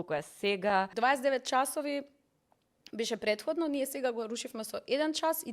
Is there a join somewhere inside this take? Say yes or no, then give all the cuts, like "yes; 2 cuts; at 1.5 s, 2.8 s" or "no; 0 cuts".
yes; 1 cut; at 0.9 s